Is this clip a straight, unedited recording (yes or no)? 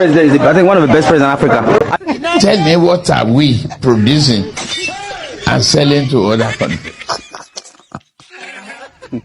no